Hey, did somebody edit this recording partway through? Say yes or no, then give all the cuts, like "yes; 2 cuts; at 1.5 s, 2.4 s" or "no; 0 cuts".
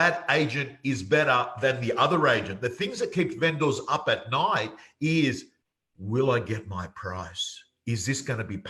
no; 0 cuts